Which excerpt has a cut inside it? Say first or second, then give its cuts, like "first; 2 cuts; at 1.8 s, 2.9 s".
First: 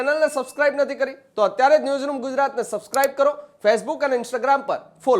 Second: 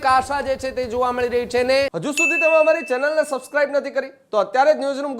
second; 1 cut; at 1.9 s